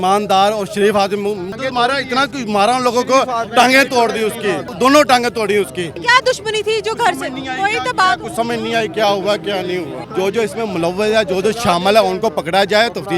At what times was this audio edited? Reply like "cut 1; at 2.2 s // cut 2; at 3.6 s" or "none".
cut 1; at 1.5 s // cut 2; at 4.7 s // cut 3; at 6.0 s // cut 4; at 10.0 s